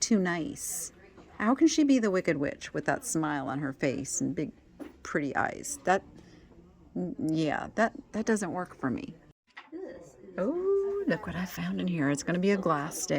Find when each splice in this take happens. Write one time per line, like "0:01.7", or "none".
0:09.2